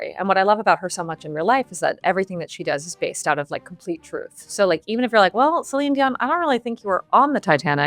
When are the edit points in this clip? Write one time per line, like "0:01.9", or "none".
none